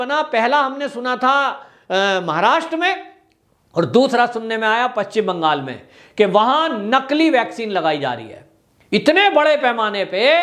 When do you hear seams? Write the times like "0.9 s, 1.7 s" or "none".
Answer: none